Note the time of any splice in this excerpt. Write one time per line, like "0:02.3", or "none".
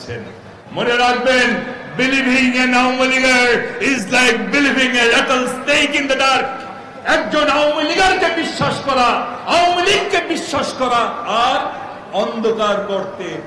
none